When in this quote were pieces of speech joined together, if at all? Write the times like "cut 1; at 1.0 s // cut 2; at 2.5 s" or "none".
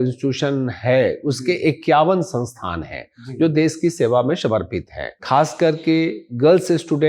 cut 1; at 5.1 s